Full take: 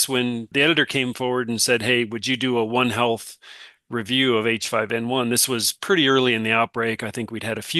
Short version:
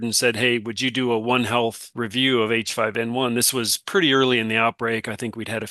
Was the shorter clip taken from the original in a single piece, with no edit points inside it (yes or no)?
no